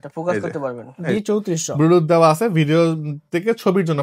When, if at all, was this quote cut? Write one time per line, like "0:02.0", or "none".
0:01.0